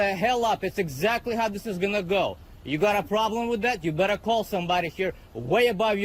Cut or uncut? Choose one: uncut